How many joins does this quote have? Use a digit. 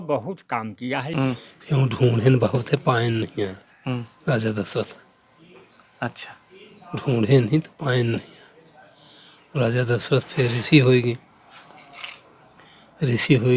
1